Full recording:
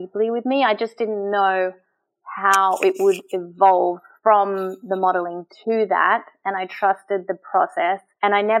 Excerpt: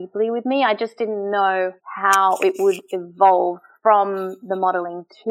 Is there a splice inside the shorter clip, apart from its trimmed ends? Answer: yes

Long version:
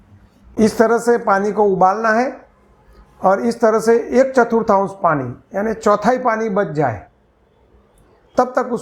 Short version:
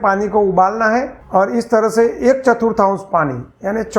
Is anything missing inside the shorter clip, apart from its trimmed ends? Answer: yes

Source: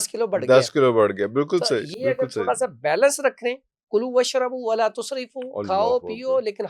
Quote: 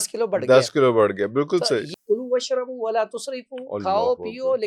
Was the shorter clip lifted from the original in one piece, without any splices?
no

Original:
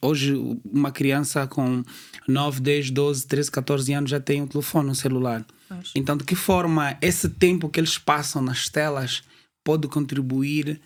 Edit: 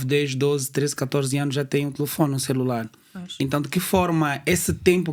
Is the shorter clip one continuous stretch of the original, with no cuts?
yes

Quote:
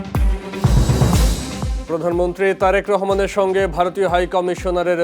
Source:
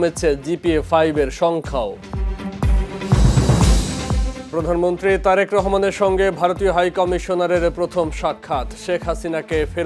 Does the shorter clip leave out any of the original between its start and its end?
yes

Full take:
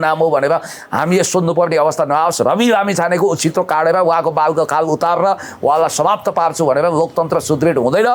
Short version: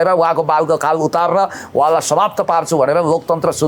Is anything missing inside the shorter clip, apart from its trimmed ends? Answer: no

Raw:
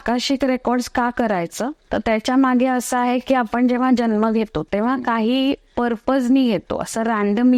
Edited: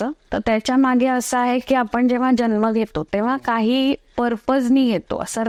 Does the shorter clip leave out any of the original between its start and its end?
no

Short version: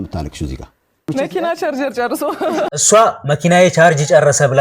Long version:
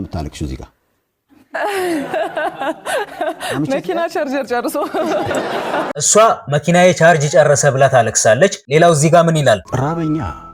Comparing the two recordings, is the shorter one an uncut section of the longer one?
no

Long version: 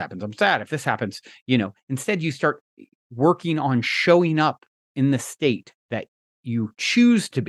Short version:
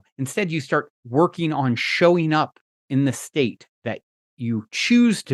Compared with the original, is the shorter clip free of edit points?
no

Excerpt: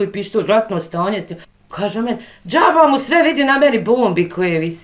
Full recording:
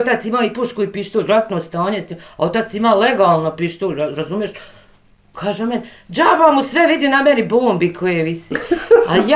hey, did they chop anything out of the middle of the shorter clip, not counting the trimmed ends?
yes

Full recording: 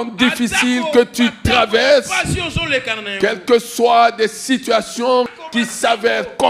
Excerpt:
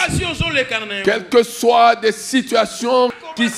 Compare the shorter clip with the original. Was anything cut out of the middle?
no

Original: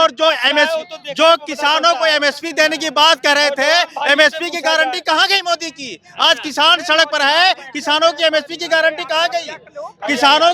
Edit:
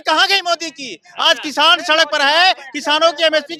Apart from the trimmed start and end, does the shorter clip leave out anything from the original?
no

